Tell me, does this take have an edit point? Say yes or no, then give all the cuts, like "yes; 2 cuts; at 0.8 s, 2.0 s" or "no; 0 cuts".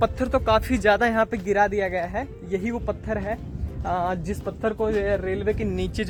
no; 0 cuts